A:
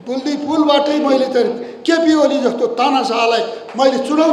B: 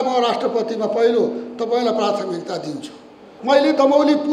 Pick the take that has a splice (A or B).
B